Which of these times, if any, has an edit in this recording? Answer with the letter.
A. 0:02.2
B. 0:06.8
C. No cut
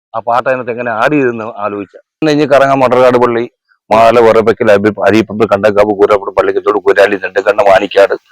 A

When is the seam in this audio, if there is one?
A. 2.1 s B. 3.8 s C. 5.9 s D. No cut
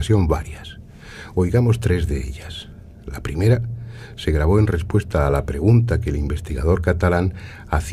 C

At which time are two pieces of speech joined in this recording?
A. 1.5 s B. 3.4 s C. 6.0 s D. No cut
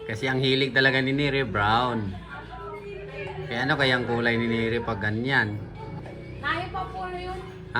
C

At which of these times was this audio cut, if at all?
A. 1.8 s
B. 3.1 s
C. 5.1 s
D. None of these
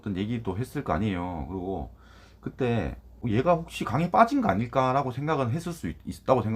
B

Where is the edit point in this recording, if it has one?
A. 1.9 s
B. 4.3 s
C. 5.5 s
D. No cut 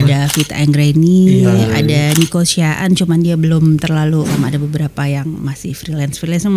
B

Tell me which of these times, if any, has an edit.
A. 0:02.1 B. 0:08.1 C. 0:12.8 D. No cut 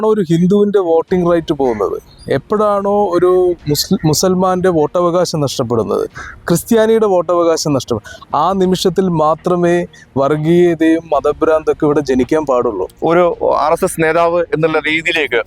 C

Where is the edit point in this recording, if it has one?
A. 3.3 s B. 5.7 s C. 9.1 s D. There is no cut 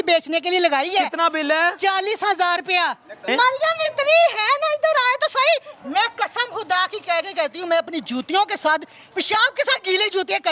A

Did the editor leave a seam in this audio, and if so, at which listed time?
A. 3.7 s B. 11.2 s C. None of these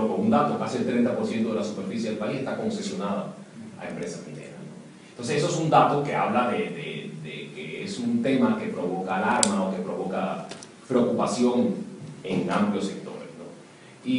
A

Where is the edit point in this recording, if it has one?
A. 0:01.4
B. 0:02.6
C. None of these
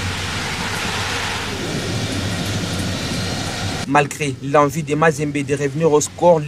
C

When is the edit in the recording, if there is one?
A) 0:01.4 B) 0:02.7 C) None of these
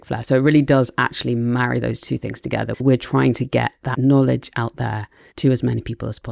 B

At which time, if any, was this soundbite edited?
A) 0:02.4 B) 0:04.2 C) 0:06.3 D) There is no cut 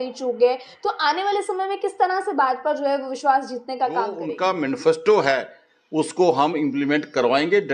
B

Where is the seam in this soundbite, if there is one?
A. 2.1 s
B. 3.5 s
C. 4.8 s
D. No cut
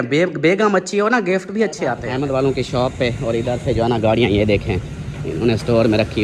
A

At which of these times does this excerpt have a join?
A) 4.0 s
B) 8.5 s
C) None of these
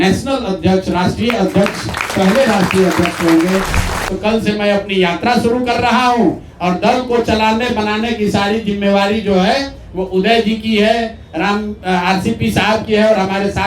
A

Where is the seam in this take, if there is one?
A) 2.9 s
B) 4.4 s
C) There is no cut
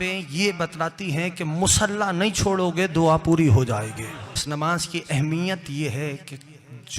B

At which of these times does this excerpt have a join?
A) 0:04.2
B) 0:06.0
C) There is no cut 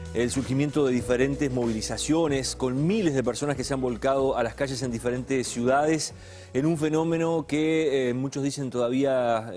A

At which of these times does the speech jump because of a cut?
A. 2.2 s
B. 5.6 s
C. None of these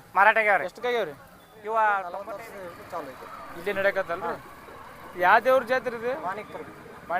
A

